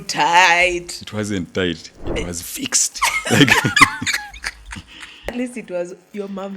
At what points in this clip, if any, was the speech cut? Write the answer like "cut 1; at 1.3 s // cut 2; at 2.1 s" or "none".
cut 1; at 5.3 s